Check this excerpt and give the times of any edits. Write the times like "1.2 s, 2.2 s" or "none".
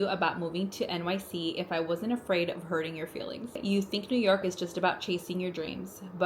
3.6 s